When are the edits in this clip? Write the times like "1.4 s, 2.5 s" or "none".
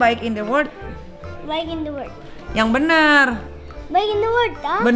none